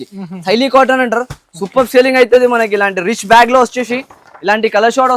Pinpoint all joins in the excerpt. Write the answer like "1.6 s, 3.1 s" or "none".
none